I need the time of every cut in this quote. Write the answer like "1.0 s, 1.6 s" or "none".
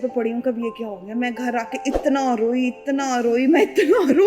none